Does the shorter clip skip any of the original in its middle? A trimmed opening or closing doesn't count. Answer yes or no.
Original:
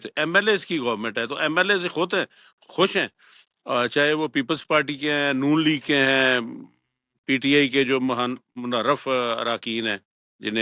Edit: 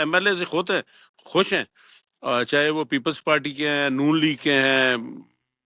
no